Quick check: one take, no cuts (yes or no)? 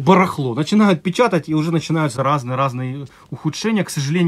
yes